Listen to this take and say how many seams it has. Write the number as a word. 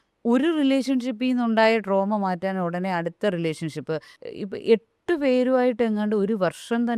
one